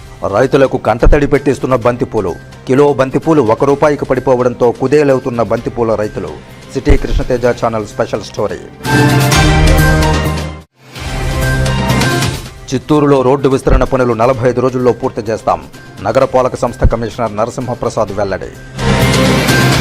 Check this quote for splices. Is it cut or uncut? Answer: uncut